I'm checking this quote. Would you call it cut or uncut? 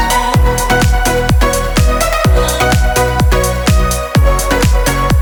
uncut